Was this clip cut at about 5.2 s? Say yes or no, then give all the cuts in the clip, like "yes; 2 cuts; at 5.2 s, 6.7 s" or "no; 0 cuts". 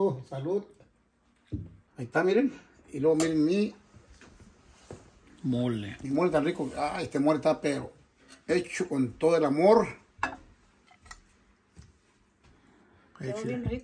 no; 1 cut; at 1.8 s